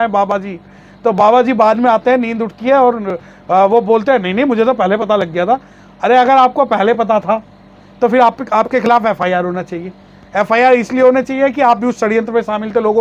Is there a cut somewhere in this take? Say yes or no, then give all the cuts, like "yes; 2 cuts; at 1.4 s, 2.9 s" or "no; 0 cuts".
no; 0 cuts